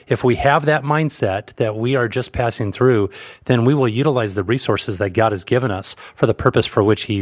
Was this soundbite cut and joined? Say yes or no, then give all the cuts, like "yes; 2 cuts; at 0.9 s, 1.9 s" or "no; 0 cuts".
no; 0 cuts